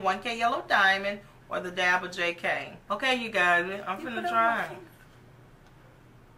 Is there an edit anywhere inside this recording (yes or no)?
yes